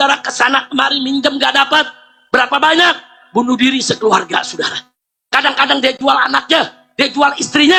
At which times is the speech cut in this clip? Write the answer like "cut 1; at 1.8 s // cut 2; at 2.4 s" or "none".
none